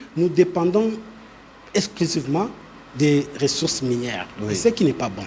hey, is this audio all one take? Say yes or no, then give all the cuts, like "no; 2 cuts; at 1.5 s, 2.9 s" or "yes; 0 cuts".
yes; 0 cuts